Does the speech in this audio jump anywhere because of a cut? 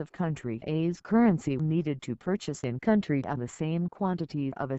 no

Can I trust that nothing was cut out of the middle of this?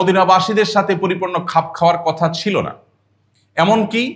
yes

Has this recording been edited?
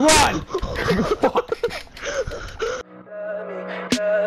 yes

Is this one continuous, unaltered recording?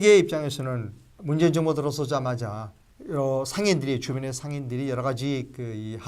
no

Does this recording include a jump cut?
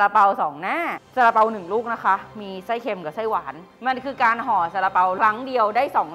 yes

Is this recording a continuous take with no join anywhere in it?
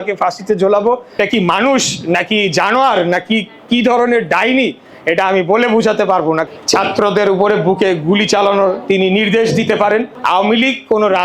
no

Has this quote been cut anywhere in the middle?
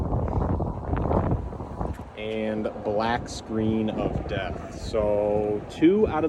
no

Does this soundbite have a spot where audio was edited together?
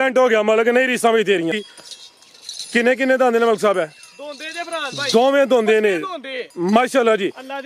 yes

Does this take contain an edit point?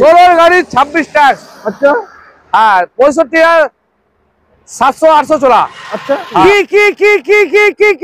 yes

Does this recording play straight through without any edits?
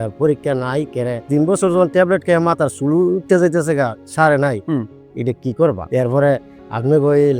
yes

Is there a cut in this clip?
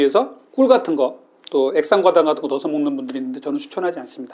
no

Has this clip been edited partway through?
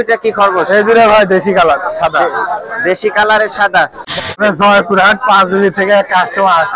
yes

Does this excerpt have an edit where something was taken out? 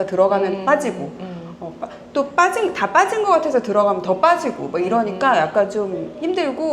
no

